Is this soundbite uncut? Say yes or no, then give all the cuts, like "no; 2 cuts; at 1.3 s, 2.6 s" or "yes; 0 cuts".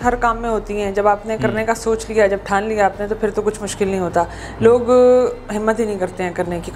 yes; 0 cuts